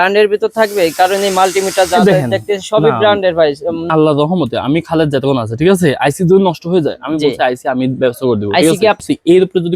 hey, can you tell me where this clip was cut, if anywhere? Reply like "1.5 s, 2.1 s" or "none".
3.9 s, 9.0 s